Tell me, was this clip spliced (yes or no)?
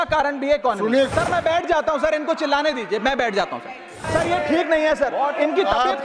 yes